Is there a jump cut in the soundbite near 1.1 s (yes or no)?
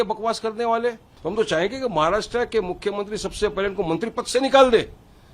yes